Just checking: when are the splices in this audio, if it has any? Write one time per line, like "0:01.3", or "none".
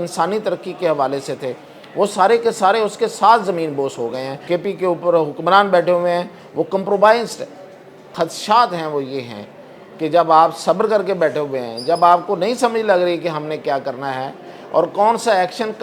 0:04.4
0:08.1